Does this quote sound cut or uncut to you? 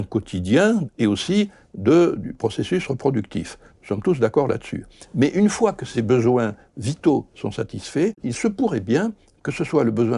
cut